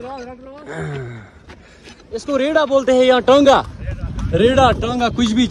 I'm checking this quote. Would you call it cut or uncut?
cut